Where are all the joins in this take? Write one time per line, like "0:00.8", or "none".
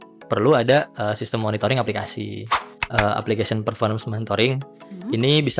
0:02.7